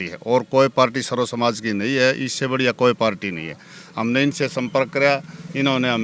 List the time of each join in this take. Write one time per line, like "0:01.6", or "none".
none